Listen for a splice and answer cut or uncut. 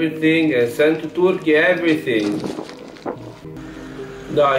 cut